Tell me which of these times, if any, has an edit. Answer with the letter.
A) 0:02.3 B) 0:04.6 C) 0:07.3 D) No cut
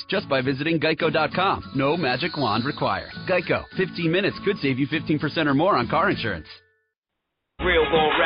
C